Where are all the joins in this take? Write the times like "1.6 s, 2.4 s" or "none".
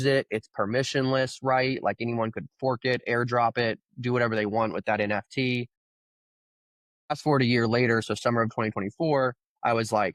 none